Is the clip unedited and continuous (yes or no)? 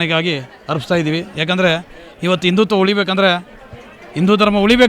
yes